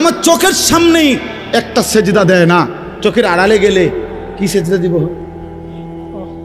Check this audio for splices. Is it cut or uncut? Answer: cut